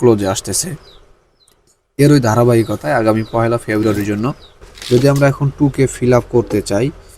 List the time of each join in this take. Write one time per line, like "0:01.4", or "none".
0:04.7